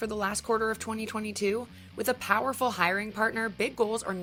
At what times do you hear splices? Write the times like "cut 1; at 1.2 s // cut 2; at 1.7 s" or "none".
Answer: none